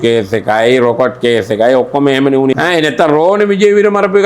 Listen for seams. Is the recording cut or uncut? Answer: cut